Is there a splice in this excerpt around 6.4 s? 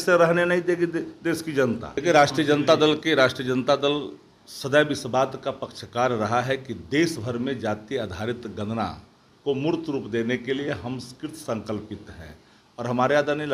no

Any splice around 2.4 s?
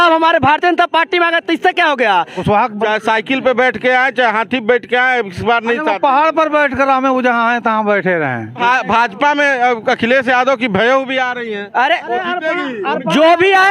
yes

